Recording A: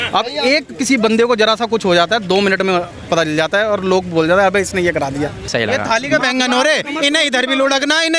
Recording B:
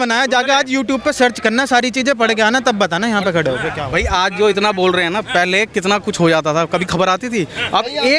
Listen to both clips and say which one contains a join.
A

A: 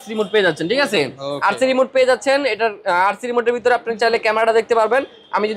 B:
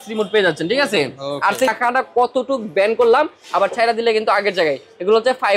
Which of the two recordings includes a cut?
B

